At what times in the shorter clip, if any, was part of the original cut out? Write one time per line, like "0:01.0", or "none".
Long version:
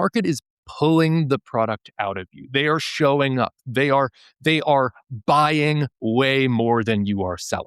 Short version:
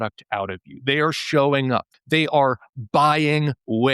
0:01.9

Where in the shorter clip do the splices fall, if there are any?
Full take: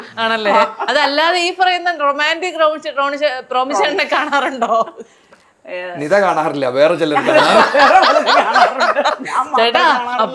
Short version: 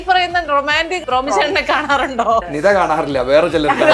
0:01.0
0:02.5

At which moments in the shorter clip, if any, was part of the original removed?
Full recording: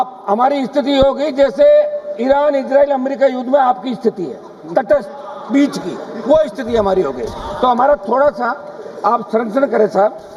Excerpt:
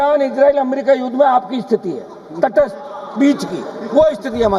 none

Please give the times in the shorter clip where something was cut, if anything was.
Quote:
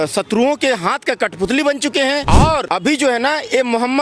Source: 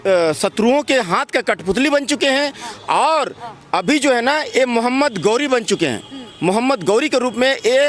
0:02.4

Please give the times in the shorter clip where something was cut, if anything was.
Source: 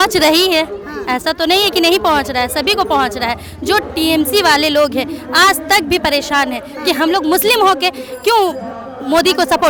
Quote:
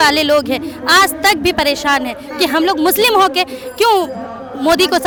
none

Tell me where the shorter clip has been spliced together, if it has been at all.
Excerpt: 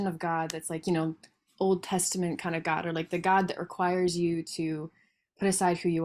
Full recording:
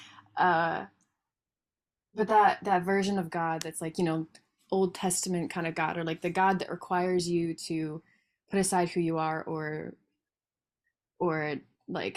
none

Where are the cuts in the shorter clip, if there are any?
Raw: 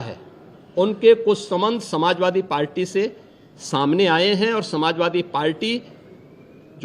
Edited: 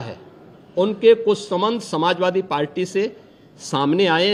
none

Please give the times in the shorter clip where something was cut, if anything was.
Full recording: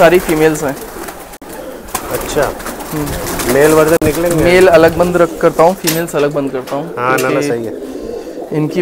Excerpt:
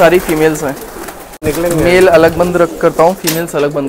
0:01.5

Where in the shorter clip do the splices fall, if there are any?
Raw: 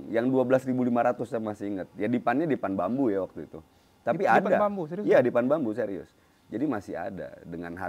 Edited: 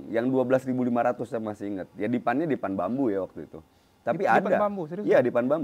none

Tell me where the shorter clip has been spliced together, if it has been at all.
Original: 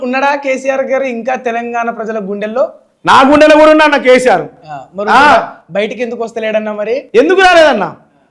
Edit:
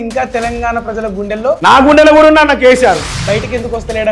0:01.6
0:03.1

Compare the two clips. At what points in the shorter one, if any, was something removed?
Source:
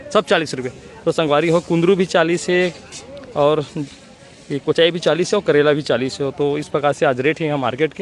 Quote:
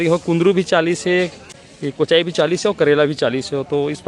0:02.0

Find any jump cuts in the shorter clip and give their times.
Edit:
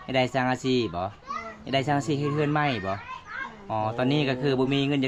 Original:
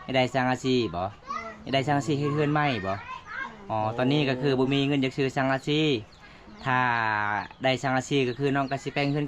none

